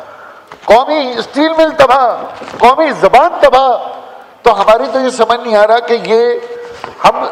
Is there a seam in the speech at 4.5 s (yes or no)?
no